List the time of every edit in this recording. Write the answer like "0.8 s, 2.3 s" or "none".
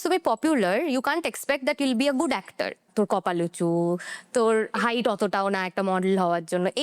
2.9 s, 4.7 s